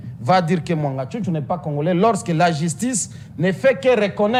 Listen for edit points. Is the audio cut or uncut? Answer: uncut